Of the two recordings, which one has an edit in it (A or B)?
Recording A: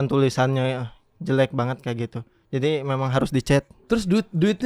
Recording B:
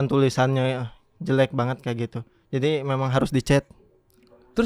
A